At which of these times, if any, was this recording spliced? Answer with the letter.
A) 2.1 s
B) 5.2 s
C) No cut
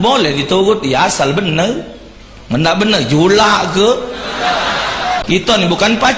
B